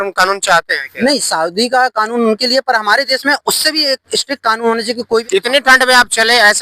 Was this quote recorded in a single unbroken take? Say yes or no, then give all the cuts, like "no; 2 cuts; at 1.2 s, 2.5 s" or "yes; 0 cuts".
no; 1 cut; at 5.2 s